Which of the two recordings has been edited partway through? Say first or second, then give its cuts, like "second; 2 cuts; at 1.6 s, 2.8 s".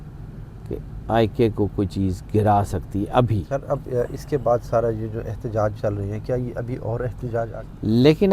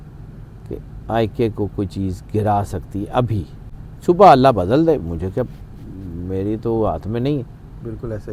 first; 2 cuts; at 3.5 s, 7.5 s